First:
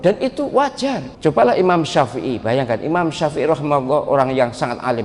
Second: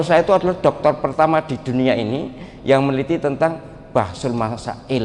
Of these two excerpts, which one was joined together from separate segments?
first; 1 cut; at 1.1 s

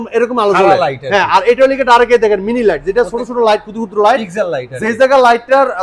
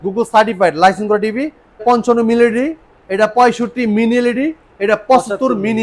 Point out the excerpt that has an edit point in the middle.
second; 1 cut; at 1.8 s

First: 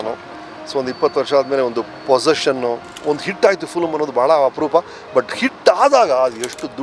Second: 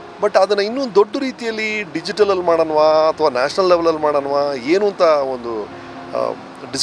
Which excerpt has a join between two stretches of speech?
first; 1 cut; at 2.9 s

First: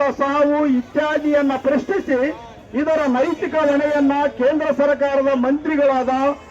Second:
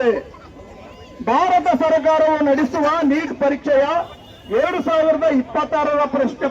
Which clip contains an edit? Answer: first; 1 cut; at 4.9 s

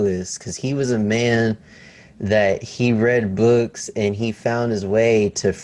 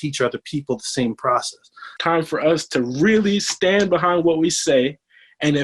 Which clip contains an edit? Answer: second; 1 cut; at 1.9 s

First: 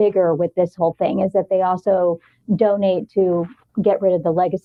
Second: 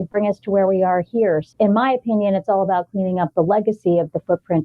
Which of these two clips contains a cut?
second; 1 cut; at 1.4 s

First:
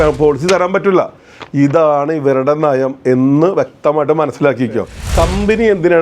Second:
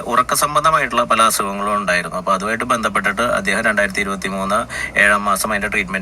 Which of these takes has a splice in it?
first; 1 cut; at 5.0 s

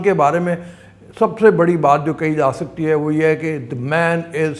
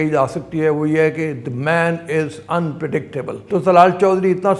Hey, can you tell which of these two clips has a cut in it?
second; 1 cut; at 3.4 s

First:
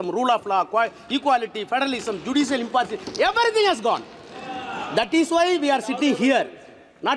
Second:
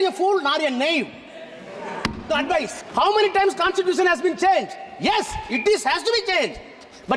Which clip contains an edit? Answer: second; 1 cut; at 2.8 s

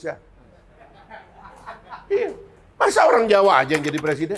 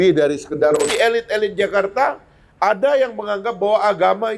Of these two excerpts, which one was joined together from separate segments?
second; 1 cut; at 0.9 s

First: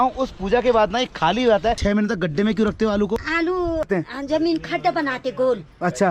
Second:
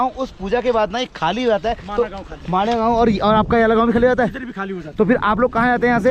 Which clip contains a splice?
first; 2 cuts; at 1.8 s, 3.9 s

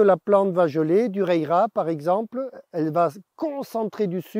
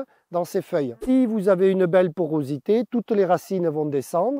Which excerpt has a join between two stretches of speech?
second; 1 cut; at 1.0 s

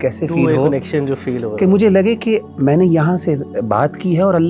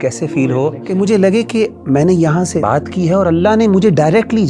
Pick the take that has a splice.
second; 2 cuts; at 0.8 s, 2.6 s

